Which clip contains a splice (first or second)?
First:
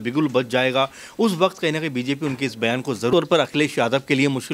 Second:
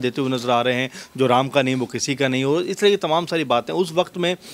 first